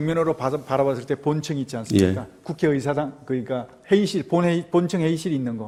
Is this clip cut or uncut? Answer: uncut